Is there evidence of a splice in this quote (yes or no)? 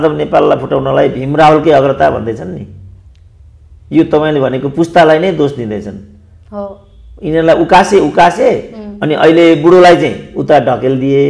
no